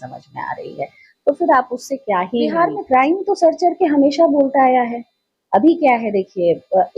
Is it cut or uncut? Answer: cut